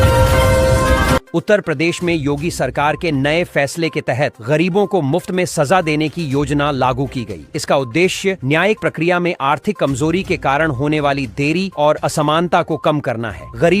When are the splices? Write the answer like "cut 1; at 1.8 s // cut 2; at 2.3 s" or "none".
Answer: cut 1; at 1.2 s